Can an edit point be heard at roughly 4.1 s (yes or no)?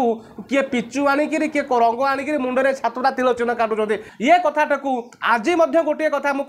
yes